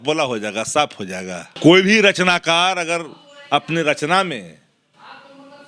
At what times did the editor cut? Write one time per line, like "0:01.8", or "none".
0:01.4